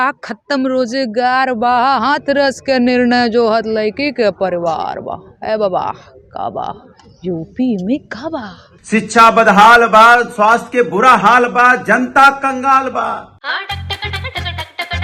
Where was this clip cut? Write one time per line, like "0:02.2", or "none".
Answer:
none